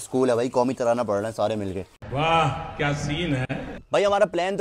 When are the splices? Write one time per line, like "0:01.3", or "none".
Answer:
none